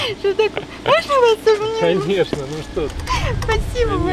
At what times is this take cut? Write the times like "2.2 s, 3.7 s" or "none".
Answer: none